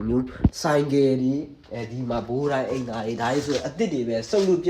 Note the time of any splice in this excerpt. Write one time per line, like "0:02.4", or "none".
none